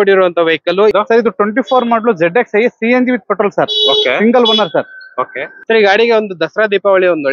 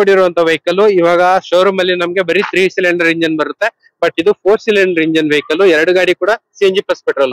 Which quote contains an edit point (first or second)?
first